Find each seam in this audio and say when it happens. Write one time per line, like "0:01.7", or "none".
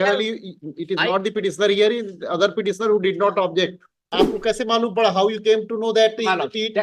0:04.1

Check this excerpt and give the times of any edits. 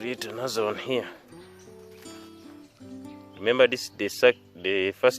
0:01.1
0:03.4

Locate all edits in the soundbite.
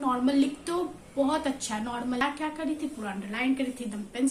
0:02.2

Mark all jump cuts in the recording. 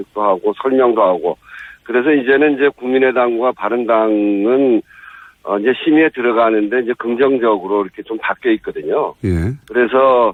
none

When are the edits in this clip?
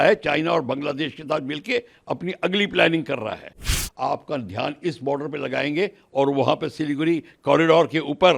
0:03.7

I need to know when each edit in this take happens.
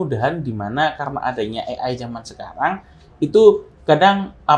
none

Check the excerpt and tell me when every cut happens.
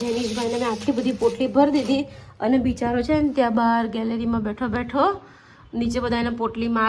none

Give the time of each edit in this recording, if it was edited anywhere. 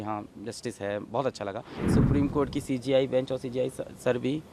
0:01.8

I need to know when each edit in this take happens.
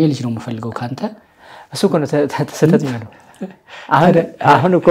none

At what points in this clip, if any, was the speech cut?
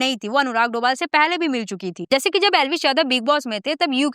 0:02.0

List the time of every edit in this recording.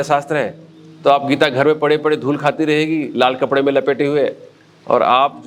none

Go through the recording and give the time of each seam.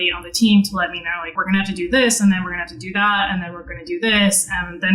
0:01.3

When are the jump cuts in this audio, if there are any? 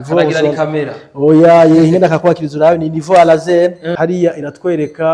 0:03.8

